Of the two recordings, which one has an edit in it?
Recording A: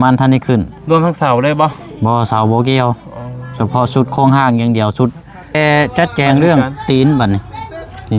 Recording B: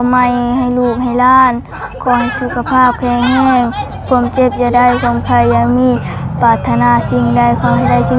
A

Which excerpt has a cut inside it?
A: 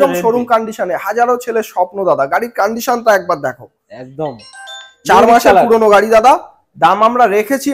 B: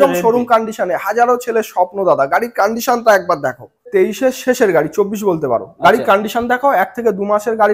B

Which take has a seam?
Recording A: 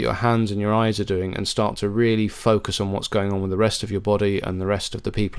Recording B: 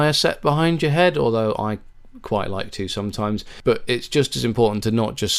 B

